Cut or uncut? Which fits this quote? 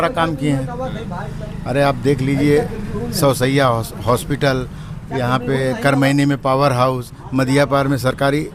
uncut